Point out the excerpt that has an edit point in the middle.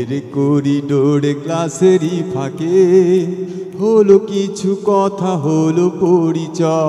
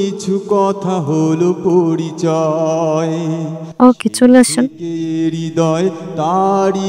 second; 2 cuts; at 3.6 s, 4.8 s

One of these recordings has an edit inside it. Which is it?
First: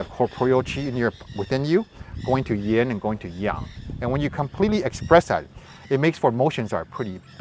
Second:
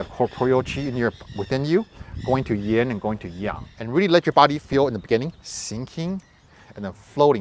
second; 1 cut; at 3.7 s

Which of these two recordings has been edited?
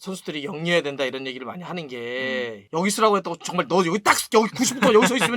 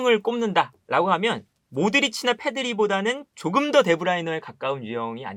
first; 1 cut; at 2.6 s

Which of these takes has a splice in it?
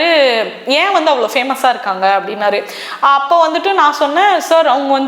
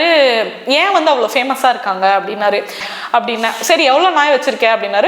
second; 1 cut; at 2.8 s

